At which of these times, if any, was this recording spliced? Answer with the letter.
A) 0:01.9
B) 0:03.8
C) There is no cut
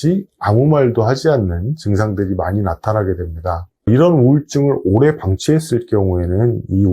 B